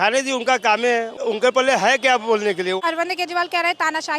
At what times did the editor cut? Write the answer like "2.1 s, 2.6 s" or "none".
1.2 s, 2.8 s